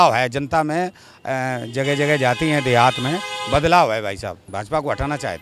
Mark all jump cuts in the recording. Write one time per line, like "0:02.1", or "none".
0:04.4